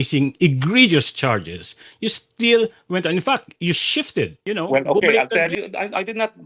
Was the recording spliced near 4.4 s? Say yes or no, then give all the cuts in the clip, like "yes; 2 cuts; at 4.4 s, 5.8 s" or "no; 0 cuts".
yes; 2 cuts; at 4.4 s, 5.5 s